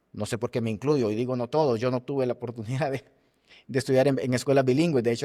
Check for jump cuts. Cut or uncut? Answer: uncut